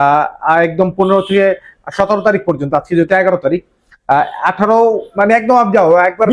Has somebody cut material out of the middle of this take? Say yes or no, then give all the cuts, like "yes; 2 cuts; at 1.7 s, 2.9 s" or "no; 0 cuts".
no; 0 cuts